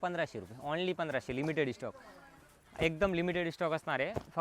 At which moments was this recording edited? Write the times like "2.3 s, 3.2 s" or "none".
none